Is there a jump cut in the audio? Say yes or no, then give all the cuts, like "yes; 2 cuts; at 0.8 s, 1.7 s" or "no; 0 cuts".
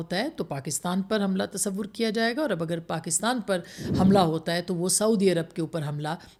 no; 0 cuts